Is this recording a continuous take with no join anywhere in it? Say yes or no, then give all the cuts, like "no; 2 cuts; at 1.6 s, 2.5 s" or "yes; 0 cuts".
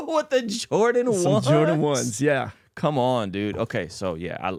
yes; 0 cuts